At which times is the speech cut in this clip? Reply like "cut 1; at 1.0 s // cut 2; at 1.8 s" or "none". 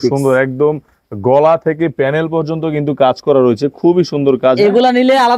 none